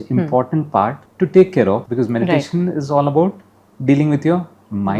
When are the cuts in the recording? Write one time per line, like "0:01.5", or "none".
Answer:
0:01.0
0:01.9